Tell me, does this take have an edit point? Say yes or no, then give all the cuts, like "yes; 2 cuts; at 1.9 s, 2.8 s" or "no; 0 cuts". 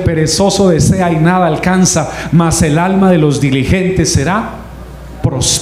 no; 0 cuts